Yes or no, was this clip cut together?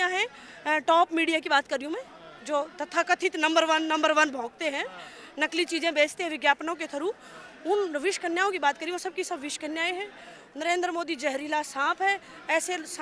no